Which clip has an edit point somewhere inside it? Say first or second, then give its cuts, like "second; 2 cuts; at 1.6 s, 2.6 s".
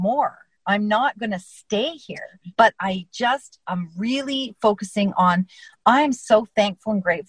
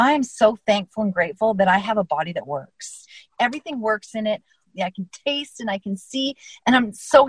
second; 2 cuts; at 3.2 s, 4.6 s